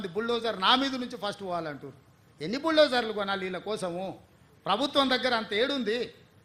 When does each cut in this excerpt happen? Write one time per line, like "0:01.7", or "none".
none